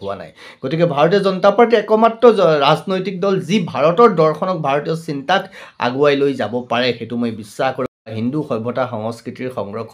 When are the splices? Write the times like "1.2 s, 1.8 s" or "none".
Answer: 8.1 s